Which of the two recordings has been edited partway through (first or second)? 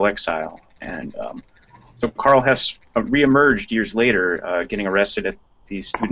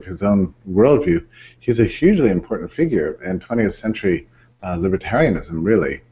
first